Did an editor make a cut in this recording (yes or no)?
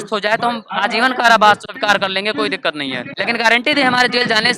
yes